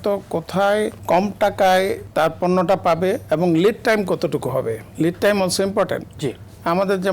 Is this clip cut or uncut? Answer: cut